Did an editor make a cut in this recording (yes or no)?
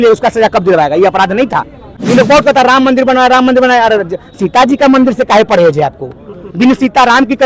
yes